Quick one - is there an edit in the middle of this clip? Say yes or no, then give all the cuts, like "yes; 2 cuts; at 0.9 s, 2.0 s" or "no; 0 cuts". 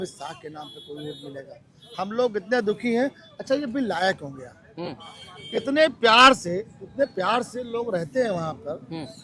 no; 0 cuts